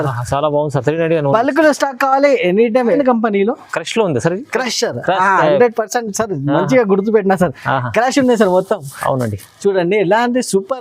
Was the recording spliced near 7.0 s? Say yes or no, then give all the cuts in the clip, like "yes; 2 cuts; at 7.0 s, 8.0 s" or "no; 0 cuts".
no; 1 cut; at 3.0 s